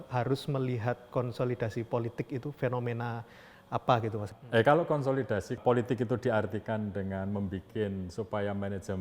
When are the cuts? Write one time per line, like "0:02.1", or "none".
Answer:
0:04.3
0:05.6